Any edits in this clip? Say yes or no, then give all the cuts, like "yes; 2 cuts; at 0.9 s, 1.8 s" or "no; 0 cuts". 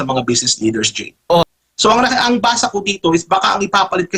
yes; 1 cut; at 1.4 s